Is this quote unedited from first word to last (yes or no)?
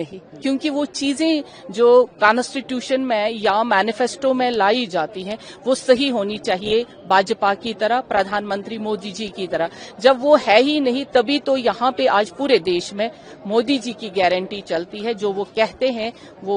yes